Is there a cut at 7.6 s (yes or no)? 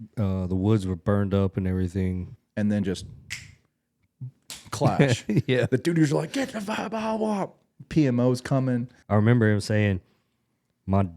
no